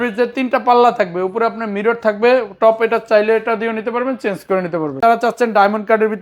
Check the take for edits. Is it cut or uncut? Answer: cut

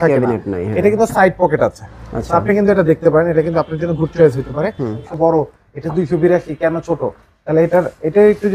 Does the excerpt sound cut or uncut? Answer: cut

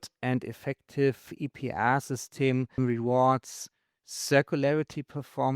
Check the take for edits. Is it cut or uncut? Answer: cut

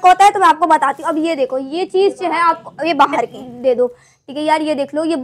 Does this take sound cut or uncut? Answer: cut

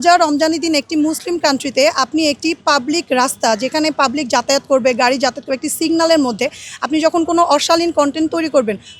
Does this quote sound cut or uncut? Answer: uncut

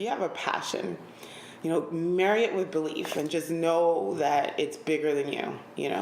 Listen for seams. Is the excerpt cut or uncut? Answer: uncut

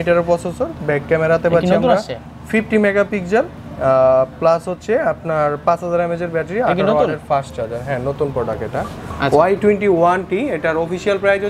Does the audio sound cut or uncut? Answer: uncut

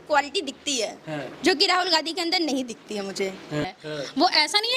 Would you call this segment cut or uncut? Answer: cut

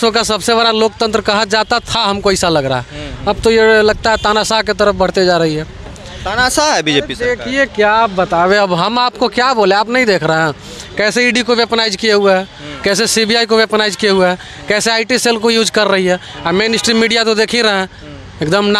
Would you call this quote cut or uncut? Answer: uncut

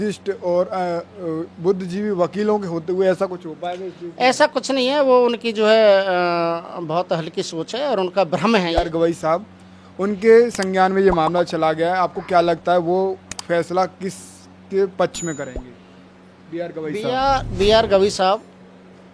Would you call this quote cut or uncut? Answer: cut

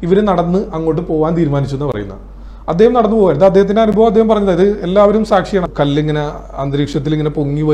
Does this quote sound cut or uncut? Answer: cut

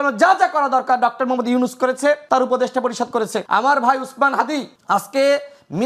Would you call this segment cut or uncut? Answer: cut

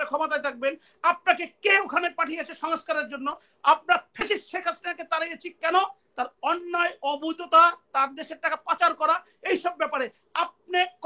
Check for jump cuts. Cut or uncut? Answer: uncut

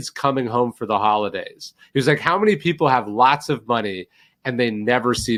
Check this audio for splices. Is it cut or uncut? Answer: uncut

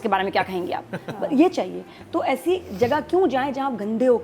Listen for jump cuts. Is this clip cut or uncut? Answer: uncut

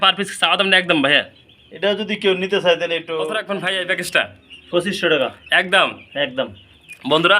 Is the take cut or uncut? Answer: cut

